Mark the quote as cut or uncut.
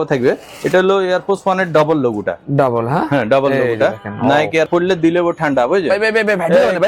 cut